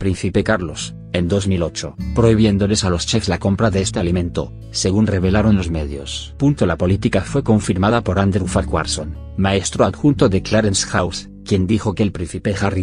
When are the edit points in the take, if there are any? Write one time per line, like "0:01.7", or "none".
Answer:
0:11.7